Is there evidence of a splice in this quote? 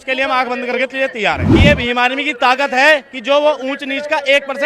yes; 1 cut; at 1.5 s

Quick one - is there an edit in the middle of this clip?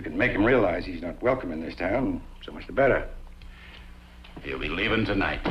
no; 0 cuts

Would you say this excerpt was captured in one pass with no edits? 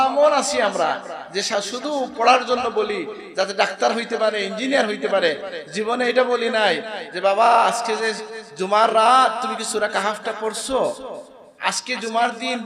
yes; 0 cuts

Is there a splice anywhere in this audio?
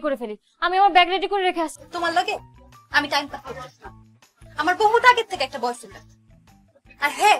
yes; 1 cut; at 1.8 s

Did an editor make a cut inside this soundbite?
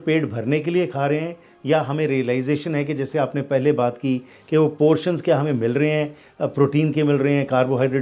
no; 0 cuts

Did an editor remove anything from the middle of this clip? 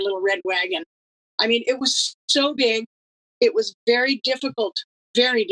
no; 0 cuts

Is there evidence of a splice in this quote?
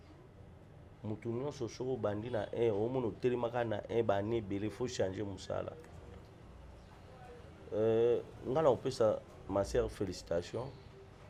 no; 0 cuts

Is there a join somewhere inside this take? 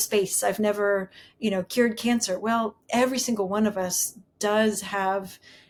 no; 0 cuts

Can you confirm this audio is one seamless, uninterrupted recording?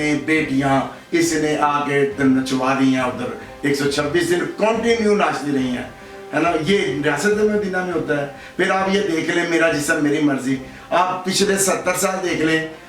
yes; 0 cuts

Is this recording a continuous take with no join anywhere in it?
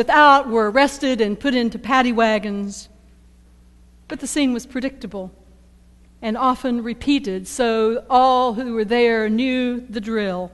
no; 1 cut; at 1.4 s

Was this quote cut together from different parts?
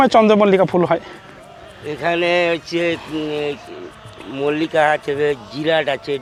no; 0 cuts

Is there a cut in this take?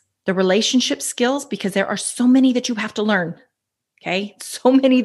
no; 0 cuts

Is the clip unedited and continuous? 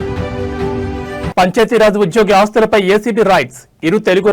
no; 1 cut; at 1.3 s

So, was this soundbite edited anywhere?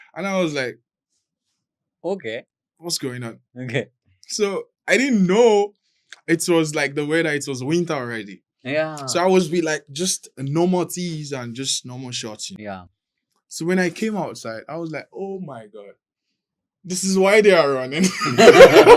no; 0 cuts

